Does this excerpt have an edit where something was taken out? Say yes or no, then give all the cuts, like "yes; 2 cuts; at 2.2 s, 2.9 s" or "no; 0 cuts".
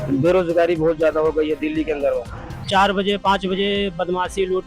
yes; 1 cut; at 2.6 s